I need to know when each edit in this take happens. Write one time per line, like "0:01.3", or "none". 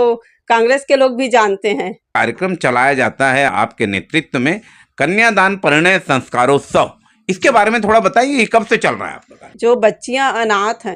0:02.0
0:03.5
0:09.5